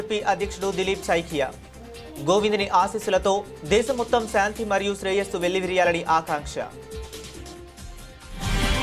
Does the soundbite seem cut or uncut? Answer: uncut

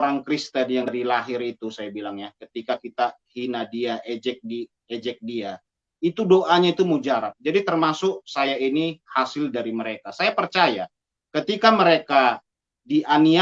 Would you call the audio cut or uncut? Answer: cut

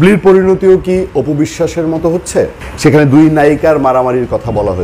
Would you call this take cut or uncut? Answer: cut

